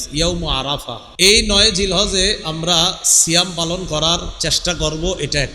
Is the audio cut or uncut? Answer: cut